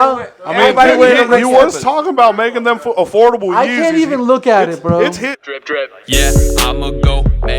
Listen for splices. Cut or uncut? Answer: cut